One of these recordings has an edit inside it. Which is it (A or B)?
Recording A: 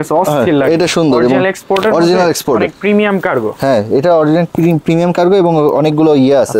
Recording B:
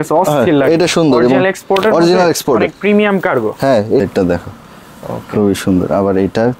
B